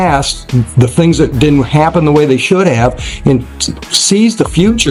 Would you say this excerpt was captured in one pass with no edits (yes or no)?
yes